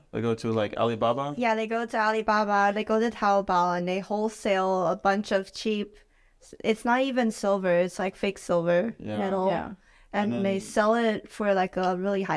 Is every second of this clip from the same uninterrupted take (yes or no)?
yes